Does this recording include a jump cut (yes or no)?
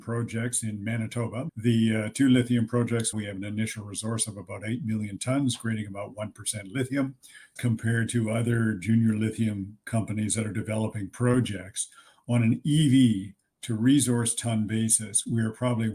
yes